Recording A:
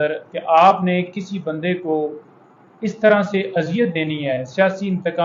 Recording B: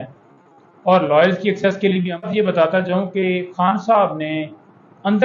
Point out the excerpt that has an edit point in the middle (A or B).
B